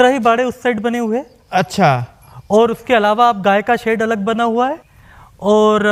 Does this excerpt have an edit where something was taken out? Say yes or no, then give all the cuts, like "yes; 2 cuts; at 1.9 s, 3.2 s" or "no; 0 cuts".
no; 0 cuts